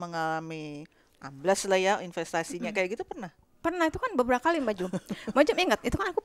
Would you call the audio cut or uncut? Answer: uncut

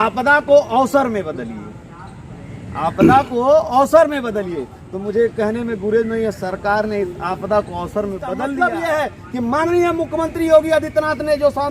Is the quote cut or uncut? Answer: cut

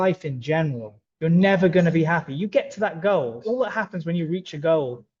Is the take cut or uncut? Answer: uncut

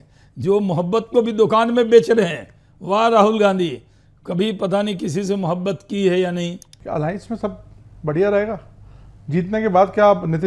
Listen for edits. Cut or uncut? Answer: cut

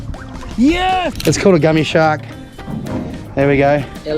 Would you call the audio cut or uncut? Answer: cut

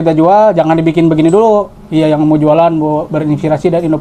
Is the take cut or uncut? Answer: cut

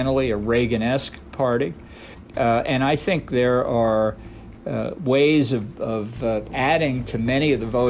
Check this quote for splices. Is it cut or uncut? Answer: uncut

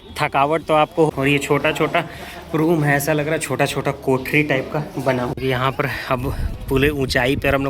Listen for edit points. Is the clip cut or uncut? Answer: cut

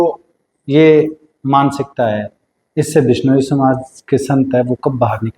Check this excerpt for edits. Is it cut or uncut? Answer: uncut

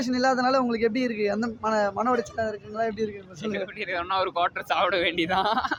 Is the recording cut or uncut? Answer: uncut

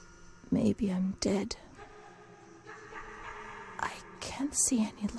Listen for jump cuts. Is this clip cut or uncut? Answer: uncut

